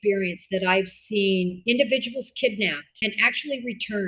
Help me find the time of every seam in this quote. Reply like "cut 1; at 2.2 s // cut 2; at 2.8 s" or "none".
cut 1; at 1.6 s // cut 2; at 2.9 s